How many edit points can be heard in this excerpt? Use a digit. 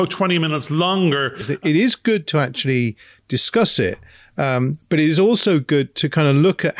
1